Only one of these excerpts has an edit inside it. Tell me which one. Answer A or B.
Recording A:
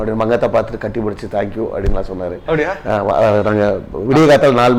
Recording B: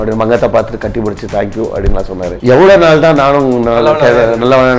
B